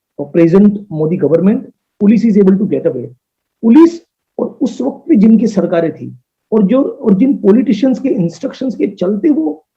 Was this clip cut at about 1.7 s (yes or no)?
yes